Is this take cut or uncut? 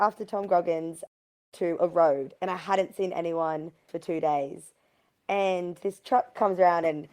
cut